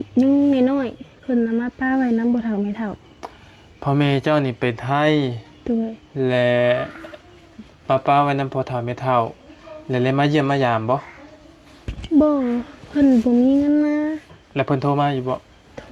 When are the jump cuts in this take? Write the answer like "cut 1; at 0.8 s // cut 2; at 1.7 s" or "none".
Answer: none